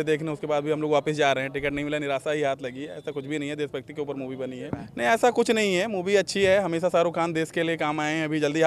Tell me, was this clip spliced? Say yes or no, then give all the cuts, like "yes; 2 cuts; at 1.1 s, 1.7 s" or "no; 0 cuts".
yes; 1 cut; at 4.8 s